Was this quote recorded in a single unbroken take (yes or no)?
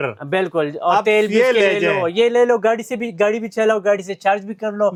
yes